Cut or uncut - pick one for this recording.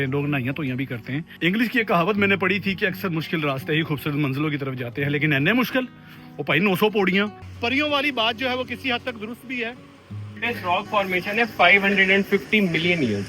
cut